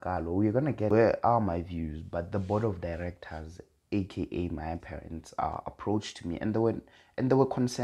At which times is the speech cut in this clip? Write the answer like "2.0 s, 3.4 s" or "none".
0.9 s